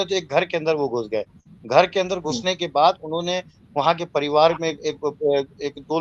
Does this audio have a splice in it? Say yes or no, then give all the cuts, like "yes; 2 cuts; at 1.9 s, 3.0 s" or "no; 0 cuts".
no; 0 cuts